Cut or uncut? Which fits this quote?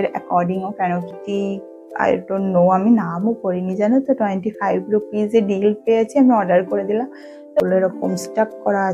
cut